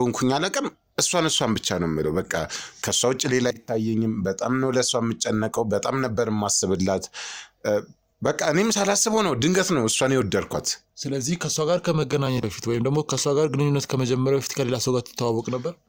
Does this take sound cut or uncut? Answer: uncut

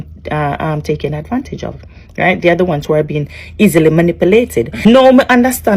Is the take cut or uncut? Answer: cut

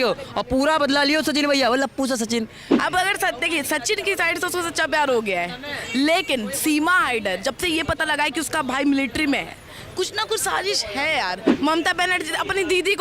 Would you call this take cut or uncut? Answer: cut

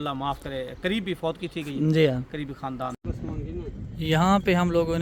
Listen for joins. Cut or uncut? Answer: cut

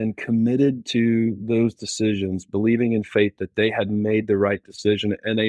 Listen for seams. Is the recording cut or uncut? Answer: uncut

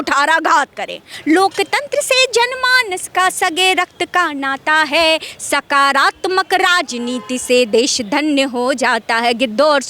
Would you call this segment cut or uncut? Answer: cut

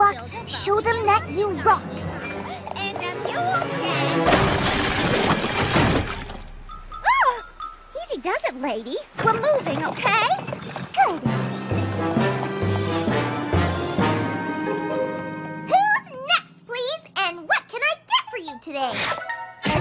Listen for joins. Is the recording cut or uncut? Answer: uncut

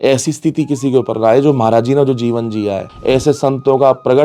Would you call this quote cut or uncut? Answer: cut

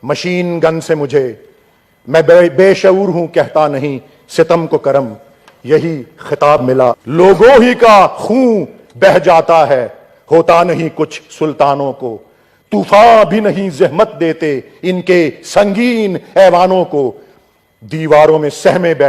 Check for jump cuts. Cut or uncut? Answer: cut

